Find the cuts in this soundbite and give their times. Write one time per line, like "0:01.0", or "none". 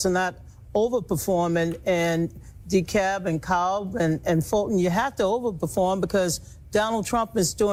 none